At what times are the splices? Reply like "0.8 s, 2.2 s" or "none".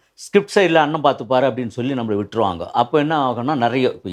none